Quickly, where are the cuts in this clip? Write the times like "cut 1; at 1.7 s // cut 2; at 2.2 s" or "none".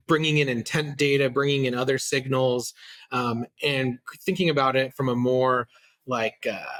none